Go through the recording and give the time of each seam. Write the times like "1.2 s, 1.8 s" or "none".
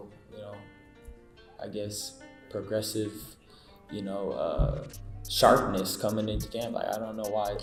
none